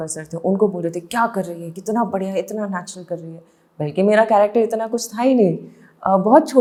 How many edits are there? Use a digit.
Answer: 0